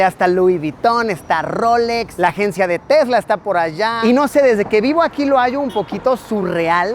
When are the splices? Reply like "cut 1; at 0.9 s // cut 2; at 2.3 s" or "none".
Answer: cut 1; at 2.1 s // cut 2; at 4.0 s